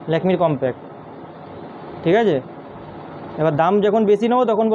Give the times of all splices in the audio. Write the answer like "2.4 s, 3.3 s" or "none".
none